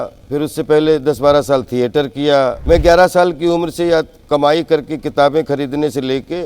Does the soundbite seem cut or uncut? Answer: cut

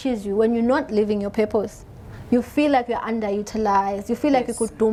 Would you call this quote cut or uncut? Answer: uncut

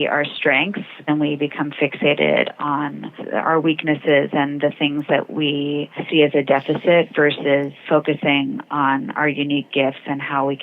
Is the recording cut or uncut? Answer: cut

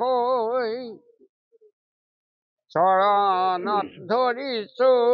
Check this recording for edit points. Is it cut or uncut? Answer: uncut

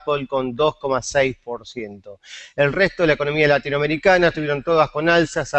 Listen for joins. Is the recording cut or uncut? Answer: cut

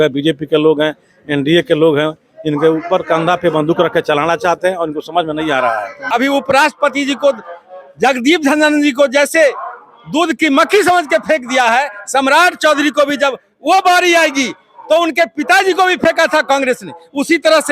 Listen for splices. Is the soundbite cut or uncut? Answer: cut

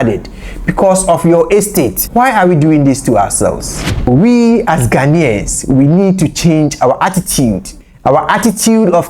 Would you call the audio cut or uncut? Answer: cut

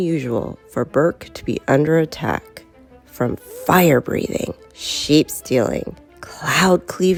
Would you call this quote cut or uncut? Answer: uncut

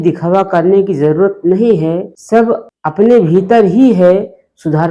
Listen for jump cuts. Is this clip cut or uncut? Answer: uncut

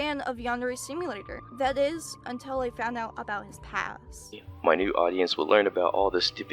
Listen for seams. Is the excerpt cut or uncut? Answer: cut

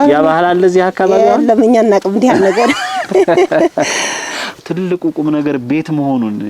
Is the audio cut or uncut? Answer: cut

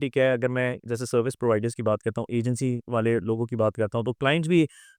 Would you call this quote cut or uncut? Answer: uncut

